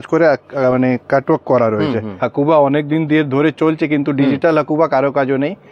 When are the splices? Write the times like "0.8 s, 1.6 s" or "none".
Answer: 2.2 s